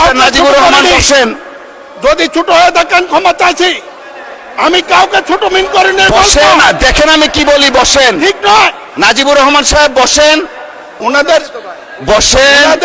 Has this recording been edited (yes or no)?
no